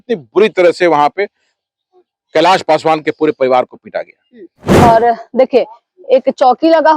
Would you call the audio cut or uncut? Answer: cut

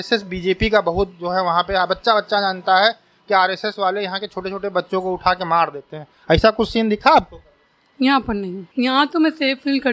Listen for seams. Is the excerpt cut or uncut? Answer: cut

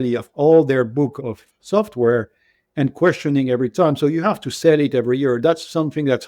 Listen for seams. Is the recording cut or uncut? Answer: cut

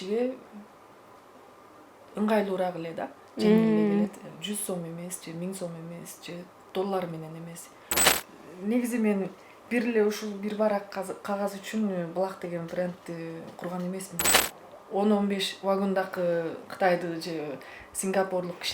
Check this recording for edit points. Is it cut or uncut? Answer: cut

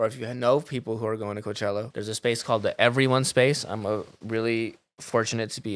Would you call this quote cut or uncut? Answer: cut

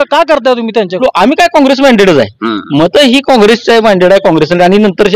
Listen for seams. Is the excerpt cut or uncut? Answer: cut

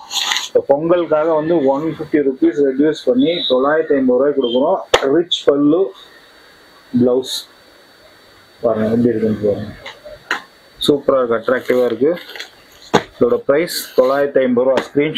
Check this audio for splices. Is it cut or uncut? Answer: uncut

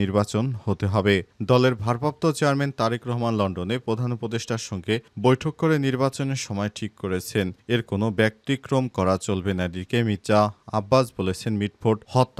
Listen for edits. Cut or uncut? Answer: uncut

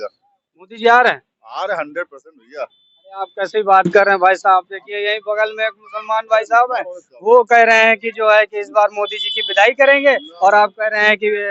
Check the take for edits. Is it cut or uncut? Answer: uncut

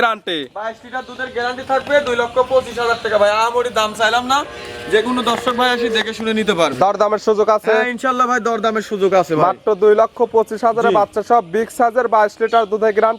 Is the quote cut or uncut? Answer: uncut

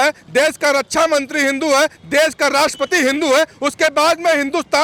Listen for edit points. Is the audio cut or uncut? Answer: uncut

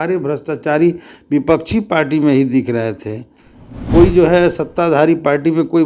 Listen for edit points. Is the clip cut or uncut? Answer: uncut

